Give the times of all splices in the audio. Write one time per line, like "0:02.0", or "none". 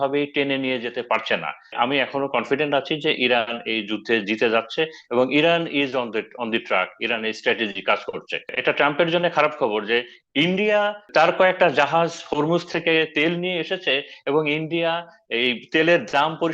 0:01.7
0:08.5
0:11.1